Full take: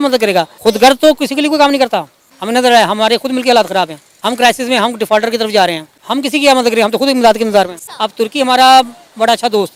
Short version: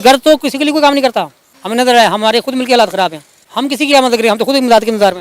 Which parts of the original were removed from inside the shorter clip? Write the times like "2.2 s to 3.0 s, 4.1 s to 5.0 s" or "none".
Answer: 4.1 s to 5.9 s